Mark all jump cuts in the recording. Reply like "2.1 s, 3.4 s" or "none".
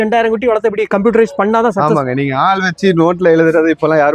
none